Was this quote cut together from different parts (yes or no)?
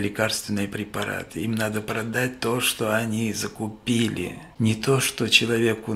yes